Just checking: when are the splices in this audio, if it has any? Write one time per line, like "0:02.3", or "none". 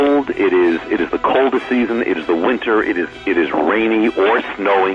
none